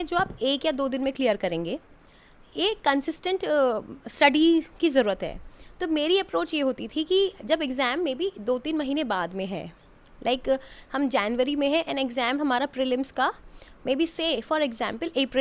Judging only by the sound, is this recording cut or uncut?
uncut